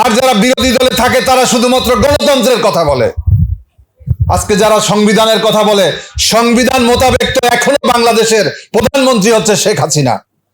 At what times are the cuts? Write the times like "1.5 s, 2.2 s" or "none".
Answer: none